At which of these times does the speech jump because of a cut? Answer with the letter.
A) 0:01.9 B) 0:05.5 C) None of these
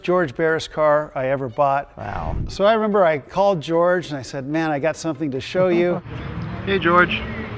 C